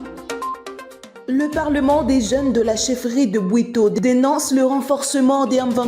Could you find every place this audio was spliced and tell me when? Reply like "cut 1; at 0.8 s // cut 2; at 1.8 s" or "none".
cut 1; at 0.9 s

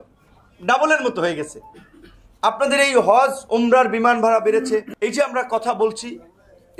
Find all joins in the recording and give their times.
none

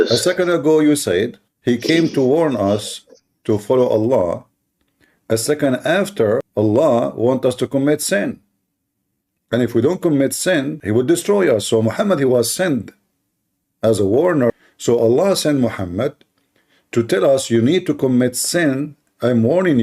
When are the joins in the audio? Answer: cut 1; at 1.4 s // cut 2; at 6.5 s // cut 3; at 10.8 s // cut 4; at 14.5 s

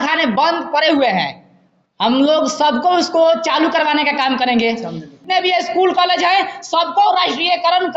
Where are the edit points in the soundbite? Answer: cut 1; at 5.1 s

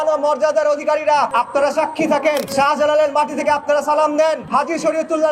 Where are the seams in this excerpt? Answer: cut 1; at 1.3 s // cut 2; at 2.5 s // cut 3; at 4.4 s

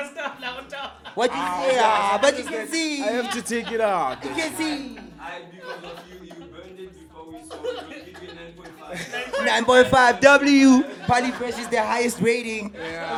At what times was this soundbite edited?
none

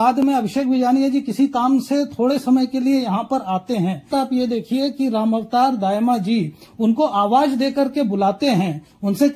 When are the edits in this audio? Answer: cut 1; at 4.1 s

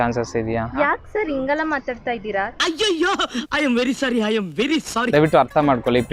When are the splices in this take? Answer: cut 1; at 5.1 s

